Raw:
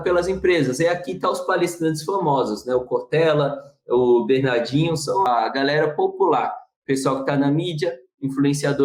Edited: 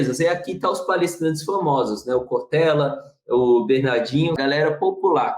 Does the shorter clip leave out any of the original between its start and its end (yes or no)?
yes